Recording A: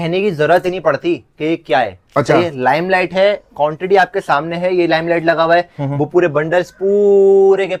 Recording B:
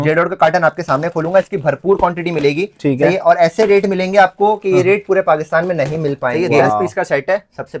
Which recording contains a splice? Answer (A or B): B